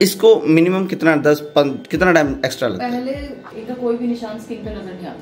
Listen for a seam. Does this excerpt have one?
yes; 1 cut; at 3.5 s

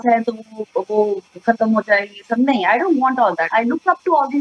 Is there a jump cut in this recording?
yes; 1 cut; at 3.5 s

